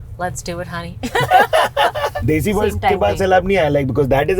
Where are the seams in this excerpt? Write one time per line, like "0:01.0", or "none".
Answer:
0:02.2